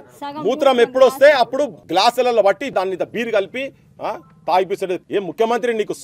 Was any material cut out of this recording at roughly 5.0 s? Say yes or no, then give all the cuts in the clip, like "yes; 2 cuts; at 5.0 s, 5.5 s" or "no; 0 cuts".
yes; 3 cuts; at 1.8 s, 2.7 s, 5.0 s